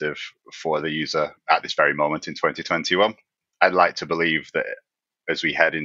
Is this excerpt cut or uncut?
cut